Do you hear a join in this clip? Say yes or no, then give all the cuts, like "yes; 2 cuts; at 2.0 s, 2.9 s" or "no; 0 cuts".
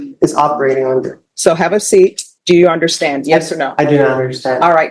yes; 2 cuts; at 1.2 s, 2.3 s